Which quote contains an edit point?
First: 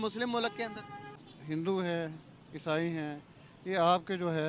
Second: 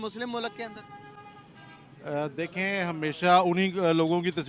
first; 1 cut; at 1.3 s

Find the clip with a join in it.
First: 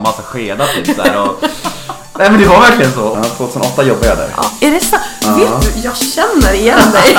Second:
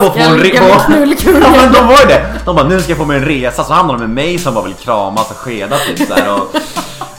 first; 1 cut; at 3.1 s

